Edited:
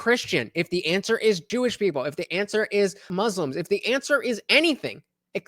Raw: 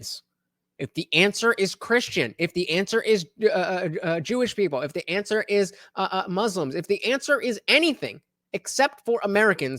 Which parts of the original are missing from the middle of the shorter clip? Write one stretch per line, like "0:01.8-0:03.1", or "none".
0:03.3-0:04.2
0:05.9-0:06.3